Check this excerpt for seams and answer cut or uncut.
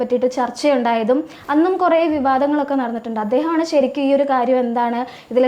uncut